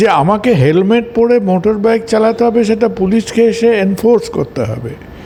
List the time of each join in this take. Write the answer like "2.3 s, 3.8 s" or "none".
none